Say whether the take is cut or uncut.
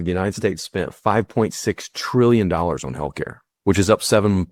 uncut